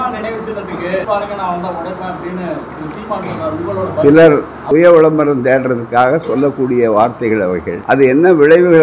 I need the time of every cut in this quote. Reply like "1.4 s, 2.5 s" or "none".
1.0 s, 4.5 s, 7.7 s